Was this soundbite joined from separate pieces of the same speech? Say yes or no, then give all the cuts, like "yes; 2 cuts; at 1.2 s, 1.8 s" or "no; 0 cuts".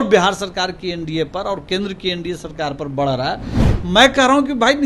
yes; 1 cut; at 3.6 s